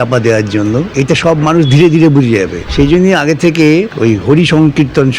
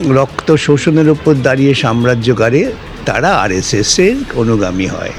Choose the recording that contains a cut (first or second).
first